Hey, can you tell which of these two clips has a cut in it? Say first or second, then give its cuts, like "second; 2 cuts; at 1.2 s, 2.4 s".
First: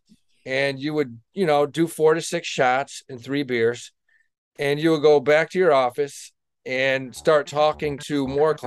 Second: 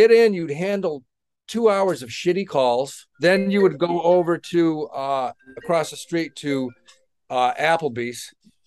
second; 1 cut; at 3.0 s